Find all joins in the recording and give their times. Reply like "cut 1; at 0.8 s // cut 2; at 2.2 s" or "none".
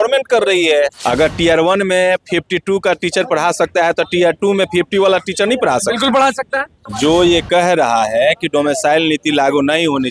cut 1; at 1.0 s // cut 2; at 6.8 s